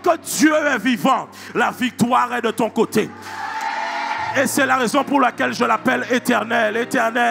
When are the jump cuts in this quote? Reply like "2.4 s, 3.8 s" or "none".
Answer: 4.3 s